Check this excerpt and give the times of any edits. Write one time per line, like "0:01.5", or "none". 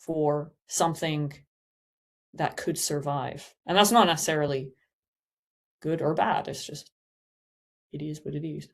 none